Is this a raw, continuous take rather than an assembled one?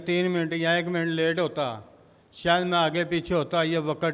yes; 0 cuts

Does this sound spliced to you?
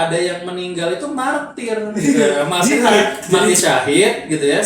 yes; 1 cut; at 3.5 s

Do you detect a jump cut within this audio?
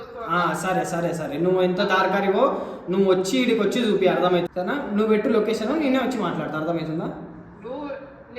yes; 1 cut; at 4.5 s

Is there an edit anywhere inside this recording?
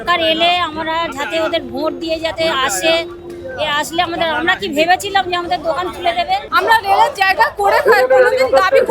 yes; 1 cut; at 6.5 s

